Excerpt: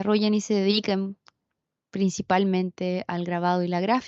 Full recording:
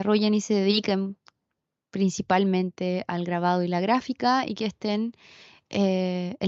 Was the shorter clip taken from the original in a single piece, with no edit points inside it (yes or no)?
yes